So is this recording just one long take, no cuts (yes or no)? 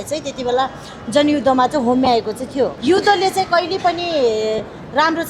no